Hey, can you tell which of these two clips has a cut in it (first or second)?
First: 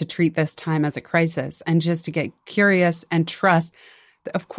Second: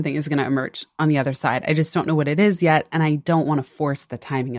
first